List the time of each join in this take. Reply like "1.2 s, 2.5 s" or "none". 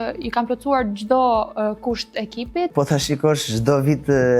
2.7 s